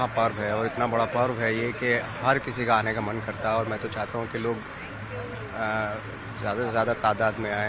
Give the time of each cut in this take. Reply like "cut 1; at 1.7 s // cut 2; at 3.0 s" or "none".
none